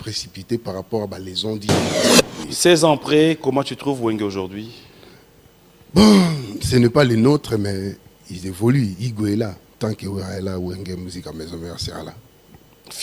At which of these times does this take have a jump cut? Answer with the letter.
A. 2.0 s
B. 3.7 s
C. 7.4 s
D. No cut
A